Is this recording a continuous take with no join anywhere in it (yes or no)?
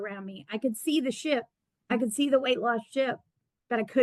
yes